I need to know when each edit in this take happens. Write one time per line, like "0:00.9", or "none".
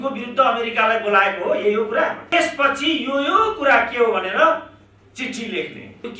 0:02.3